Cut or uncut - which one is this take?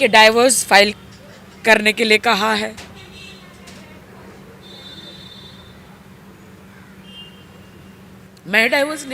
uncut